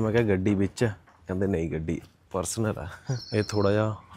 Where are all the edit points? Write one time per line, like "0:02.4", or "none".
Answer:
0:03.2